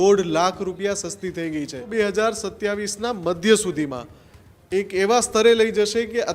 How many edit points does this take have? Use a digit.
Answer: 1